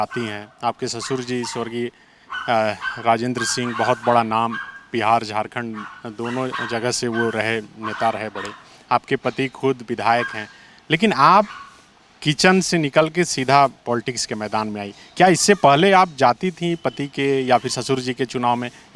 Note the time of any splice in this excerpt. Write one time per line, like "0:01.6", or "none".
none